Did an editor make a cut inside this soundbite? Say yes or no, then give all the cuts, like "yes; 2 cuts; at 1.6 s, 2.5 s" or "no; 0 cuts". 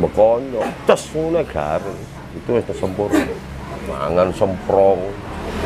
yes; 1 cut; at 4.0 s